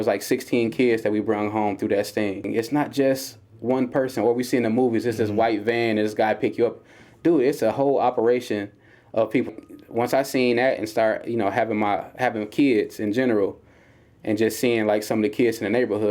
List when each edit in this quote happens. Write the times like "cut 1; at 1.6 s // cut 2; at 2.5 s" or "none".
cut 1; at 2.4 s // cut 2; at 9.5 s